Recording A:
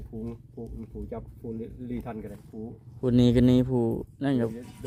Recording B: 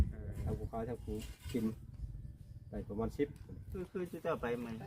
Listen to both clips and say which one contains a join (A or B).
B